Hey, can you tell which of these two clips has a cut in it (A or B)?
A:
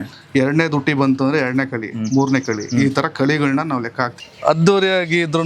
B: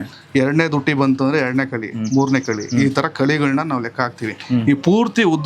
A